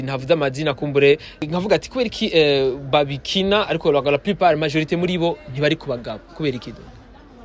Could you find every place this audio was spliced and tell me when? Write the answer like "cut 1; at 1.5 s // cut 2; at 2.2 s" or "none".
cut 1; at 1.4 s